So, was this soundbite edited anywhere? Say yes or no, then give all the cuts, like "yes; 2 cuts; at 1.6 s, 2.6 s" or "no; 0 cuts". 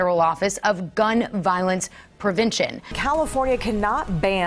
yes; 1 cut; at 2.9 s